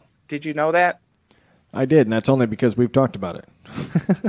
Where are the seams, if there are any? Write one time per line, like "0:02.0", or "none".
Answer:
none